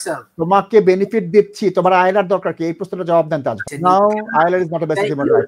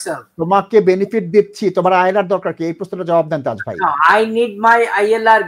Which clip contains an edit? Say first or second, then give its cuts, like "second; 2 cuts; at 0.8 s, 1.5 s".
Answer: first; 1 cut; at 3.7 s